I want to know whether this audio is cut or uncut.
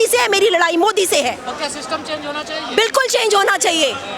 uncut